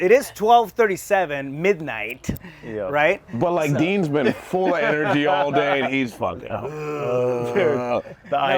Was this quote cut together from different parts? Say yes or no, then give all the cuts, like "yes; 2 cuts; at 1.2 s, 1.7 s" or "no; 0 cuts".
no; 0 cuts